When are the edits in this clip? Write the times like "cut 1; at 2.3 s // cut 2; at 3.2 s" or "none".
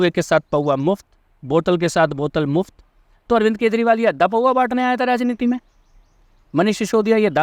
none

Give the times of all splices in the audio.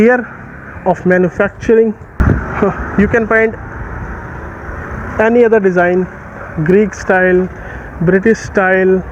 cut 1; at 2.2 s

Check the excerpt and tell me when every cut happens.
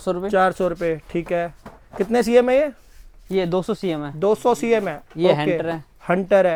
none

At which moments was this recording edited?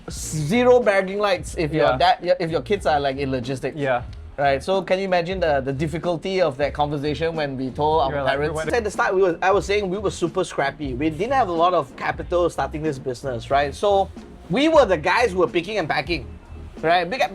cut 1; at 8.7 s

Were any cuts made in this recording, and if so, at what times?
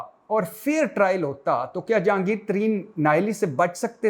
none

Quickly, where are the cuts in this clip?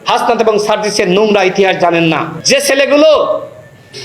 cut 1; at 2.3 s

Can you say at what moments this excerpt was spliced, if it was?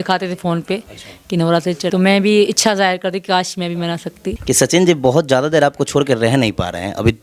cut 1; at 1.9 s // cut 2; at 4.3 s

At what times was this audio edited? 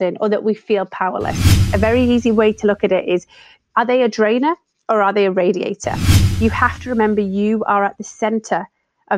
cut 1; at 1.7 s // cut 2; at 3.6 s // cut 3; at 6.2 s

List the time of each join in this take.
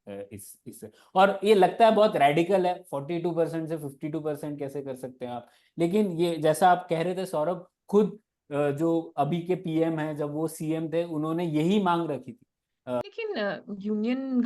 cut 1; at 13.0 s

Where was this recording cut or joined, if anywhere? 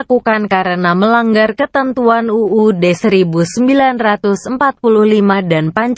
cut 1; at 3.0 s

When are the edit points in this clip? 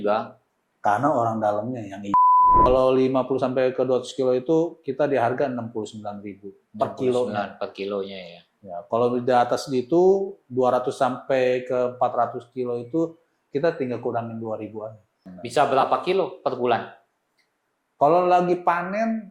cut 1; at 2.7 s // cut 2; at 15.3 s

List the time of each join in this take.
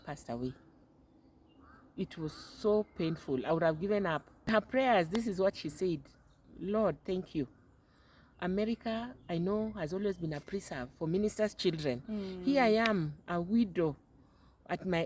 cut 1; at 4.5 s

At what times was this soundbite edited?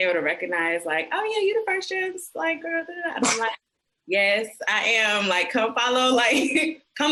none

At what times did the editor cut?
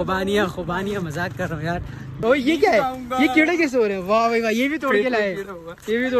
cut 1; at 2.2 s

